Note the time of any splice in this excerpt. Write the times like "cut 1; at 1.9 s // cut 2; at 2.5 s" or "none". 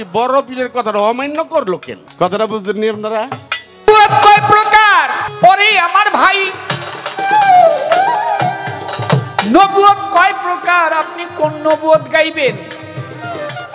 cut 1; at 2.0 s // cut 2; at 3.9 s // cut 3; at 5.2 s